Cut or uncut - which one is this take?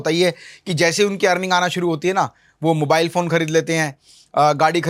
uncut